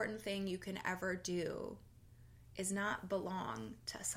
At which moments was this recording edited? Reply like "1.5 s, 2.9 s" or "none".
none